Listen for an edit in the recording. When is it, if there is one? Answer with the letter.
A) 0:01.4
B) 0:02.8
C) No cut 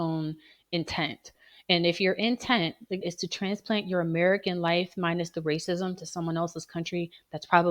C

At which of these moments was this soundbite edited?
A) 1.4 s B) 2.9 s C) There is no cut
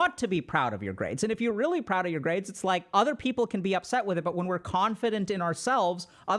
B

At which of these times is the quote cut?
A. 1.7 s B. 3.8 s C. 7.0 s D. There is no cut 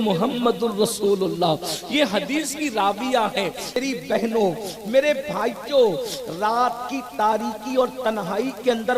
B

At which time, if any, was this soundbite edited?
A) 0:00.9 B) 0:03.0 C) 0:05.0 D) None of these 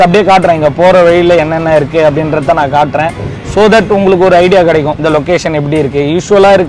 C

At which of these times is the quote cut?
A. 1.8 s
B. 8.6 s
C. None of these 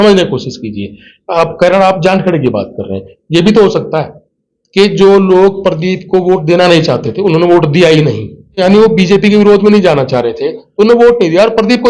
B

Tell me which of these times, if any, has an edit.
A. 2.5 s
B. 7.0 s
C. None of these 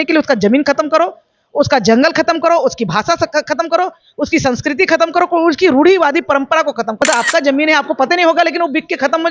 B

